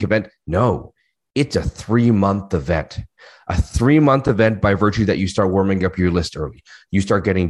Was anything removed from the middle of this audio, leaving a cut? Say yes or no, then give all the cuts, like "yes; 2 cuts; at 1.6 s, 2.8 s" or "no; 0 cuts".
no; 0 cuts